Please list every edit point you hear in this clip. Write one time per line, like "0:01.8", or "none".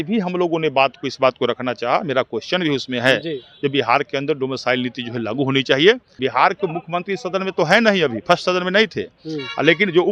0:06.1